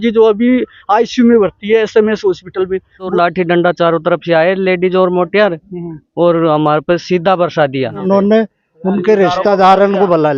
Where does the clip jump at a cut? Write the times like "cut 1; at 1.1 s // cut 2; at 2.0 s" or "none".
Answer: cut 1; at 3.1 s // cut 2; at 8.0 s